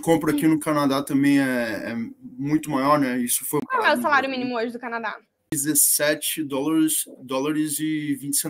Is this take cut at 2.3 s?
no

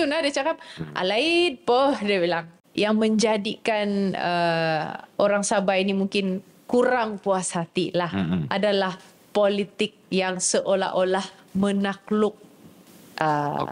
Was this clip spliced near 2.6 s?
yes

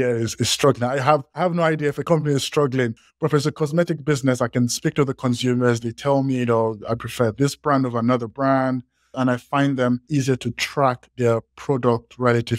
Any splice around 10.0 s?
yes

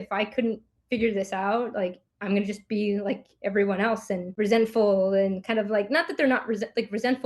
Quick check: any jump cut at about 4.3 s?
yes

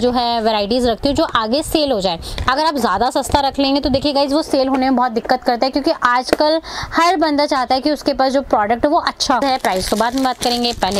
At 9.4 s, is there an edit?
yes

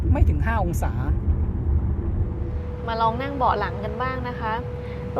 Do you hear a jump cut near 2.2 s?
no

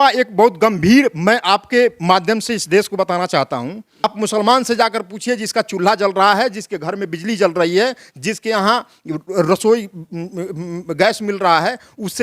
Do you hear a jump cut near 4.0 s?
yes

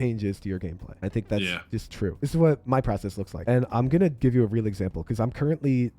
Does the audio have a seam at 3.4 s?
yes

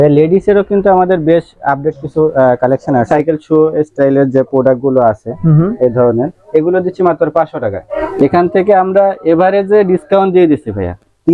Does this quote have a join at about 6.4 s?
no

